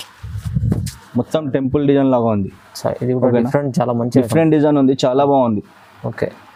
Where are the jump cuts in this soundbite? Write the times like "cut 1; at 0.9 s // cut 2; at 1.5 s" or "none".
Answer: none